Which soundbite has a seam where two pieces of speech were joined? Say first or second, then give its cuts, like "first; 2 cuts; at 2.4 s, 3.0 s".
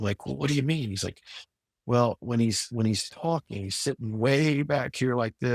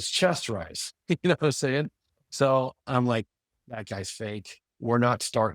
second; 1 cut; at 4.6 s